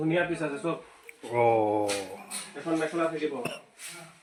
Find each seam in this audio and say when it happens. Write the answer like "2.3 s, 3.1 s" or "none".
none